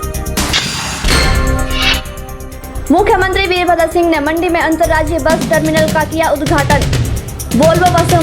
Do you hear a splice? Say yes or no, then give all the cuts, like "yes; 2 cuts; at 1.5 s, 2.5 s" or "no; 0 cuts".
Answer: no; 0 cuts